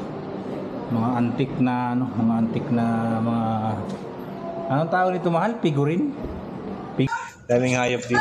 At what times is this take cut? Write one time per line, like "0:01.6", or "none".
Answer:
0:07.1